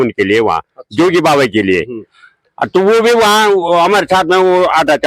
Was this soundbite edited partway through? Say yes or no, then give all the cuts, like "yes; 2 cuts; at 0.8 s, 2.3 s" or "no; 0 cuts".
no; 0 cuts